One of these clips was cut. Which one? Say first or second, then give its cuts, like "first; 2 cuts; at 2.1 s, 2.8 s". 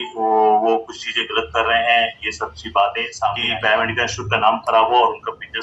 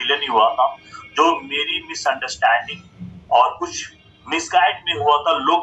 first; 1 cut; at 3.5 s